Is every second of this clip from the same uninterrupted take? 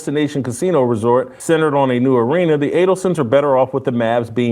no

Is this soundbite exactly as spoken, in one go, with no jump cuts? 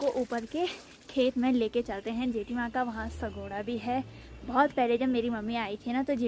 yes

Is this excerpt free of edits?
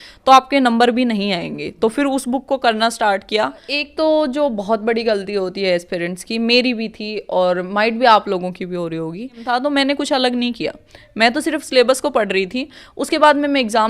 no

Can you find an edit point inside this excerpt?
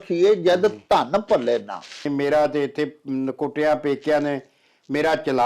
yes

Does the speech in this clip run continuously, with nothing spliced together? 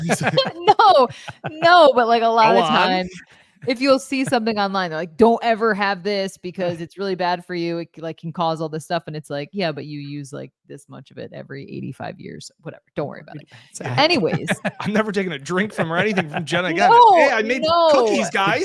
yes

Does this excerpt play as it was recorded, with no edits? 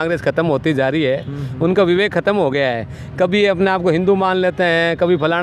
yes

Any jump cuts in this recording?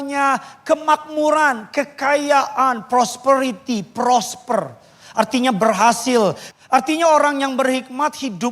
yes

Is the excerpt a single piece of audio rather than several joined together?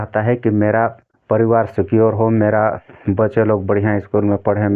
no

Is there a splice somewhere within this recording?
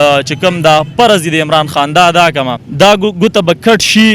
yes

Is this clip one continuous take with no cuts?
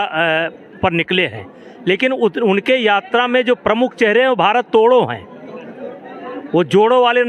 yes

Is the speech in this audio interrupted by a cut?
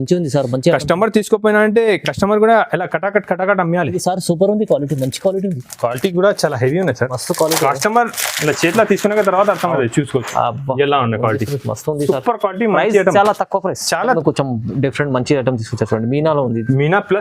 yes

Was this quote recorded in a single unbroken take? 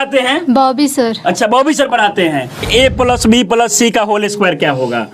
no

